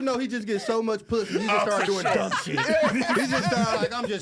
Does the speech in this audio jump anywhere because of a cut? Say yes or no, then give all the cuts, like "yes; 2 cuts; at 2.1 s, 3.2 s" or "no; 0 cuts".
no; 0 cuts